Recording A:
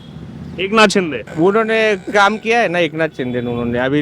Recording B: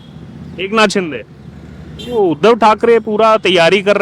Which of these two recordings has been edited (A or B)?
A